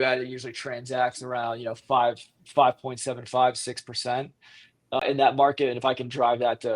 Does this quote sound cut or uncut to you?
cut